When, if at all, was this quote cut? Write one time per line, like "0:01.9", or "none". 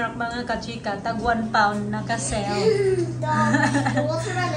none